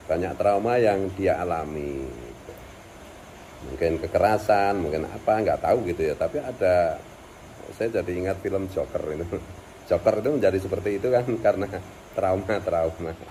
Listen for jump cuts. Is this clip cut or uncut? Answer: uncut